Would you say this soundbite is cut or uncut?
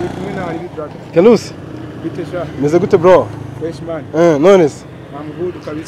uncut